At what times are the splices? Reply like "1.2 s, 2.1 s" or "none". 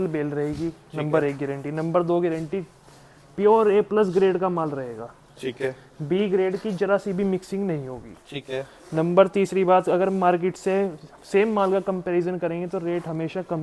none